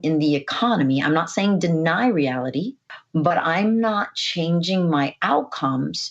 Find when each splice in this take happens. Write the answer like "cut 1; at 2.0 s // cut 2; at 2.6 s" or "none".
cut 1; at 2.9 s